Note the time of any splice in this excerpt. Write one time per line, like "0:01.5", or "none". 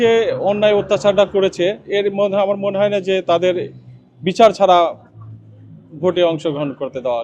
none